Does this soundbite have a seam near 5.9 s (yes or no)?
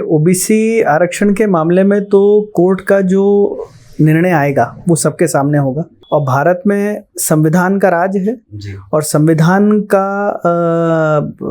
yes